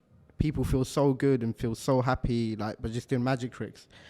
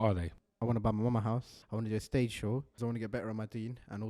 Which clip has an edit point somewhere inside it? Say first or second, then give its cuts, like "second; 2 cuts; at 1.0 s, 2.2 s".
second; 2 cuts; at 1.5 s, 2.8 s